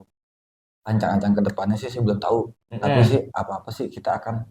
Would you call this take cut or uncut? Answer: uncut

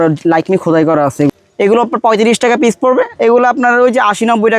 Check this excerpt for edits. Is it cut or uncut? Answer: cut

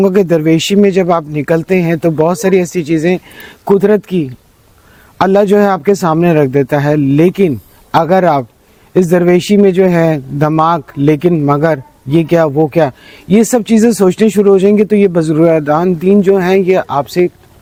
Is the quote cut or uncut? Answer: uncut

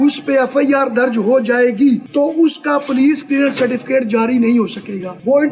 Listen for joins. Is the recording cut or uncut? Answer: uncut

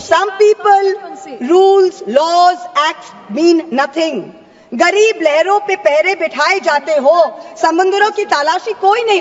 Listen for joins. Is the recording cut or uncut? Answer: uncut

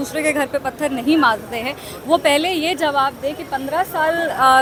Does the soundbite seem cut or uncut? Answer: uncut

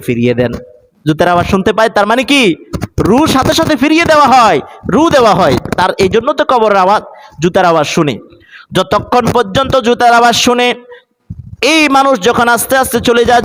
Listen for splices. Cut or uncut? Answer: uncut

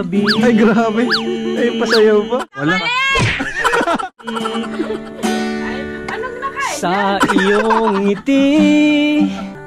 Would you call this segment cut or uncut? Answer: cut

